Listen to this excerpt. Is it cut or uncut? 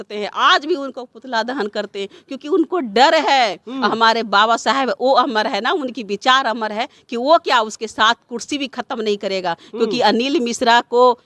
uncut